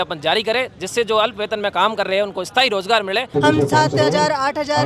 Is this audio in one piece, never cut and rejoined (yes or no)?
no